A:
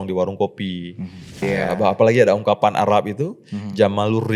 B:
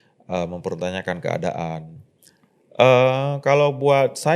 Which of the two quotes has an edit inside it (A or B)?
A